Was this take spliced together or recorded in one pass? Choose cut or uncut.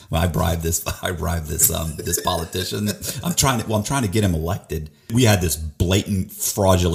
cut